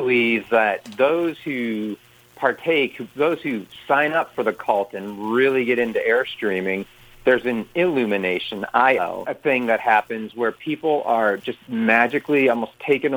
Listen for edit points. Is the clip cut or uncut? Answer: uncut